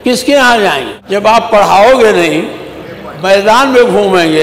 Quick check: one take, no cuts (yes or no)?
no